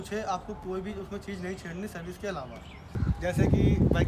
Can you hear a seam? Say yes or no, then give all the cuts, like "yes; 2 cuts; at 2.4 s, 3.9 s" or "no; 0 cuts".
yes; 1 cut; at 3.0 s